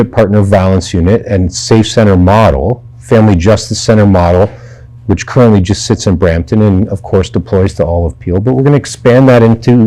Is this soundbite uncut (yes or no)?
yes